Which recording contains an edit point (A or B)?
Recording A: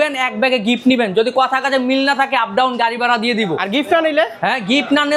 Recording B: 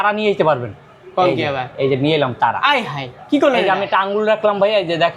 B